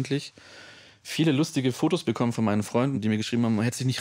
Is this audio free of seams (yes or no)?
no